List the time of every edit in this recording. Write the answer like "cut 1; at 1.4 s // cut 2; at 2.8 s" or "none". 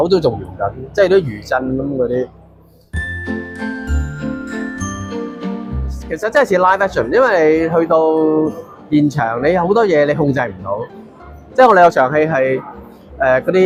none